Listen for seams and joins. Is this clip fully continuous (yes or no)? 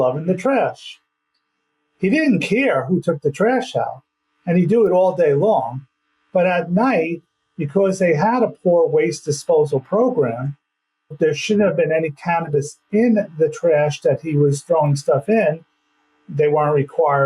no